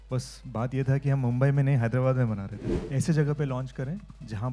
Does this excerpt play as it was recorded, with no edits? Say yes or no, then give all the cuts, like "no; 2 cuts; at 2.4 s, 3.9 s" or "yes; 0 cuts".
no; 1 cut; at 2.6 s